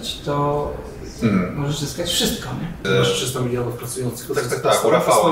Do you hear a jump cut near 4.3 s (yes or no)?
no